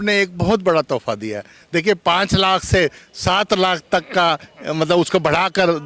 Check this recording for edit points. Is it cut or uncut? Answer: uncut